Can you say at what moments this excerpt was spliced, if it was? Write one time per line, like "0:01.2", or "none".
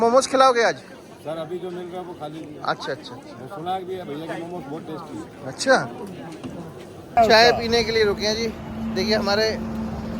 0:06.9